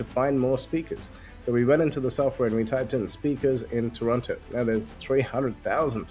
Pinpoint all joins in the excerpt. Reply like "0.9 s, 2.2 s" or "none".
4.5 s